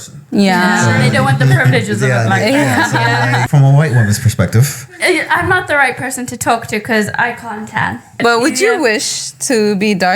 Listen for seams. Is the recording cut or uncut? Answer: cut